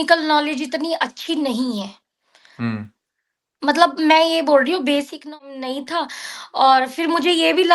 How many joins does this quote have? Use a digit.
1